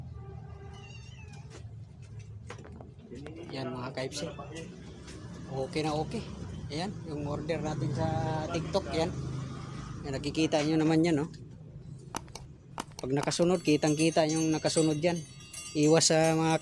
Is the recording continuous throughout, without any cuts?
yes; 0 cuts

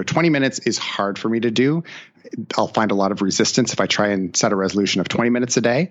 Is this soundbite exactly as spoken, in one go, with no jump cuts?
no; 1 cut; at 2.1 s

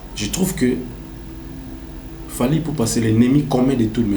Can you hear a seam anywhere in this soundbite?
no; 0 cuts

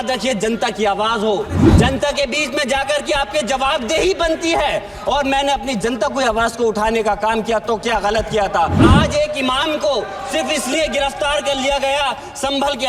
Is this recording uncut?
no; 1 cut; at 8.8 s

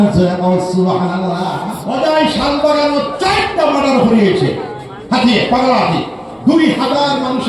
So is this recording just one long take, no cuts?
no; 1 cut; at 1.8 s

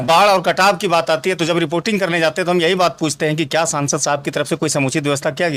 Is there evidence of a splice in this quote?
no; 0 cuts

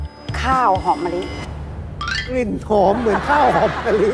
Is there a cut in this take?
no; 0 cuts

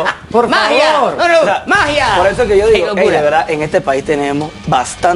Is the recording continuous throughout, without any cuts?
yes; 0 cuts

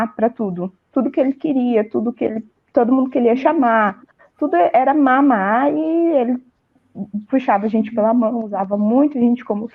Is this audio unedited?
yes; 0 cuts

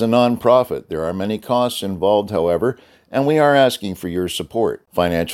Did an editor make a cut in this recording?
no; 0 cuts

